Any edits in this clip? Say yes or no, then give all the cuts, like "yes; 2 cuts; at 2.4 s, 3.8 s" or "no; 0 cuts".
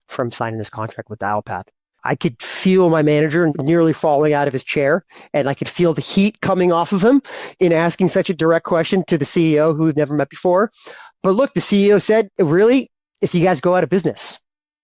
yes; 3 cuts; at 2.0 s, 3.5 s, 12.4 s